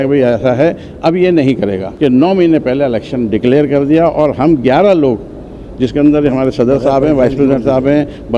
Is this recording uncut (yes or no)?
no